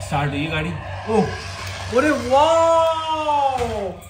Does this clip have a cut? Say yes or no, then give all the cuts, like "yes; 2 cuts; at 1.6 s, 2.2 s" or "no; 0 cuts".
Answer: no; 0 cuts